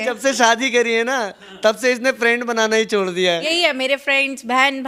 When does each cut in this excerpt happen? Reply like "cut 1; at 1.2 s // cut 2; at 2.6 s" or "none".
cut 1; at 3.5 s